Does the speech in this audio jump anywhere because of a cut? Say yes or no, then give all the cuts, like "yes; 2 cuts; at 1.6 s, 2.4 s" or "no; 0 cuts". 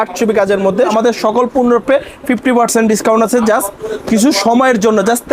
yes; 1 cut; at 0.9 s